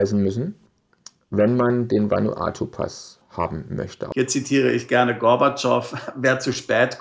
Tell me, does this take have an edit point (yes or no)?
yes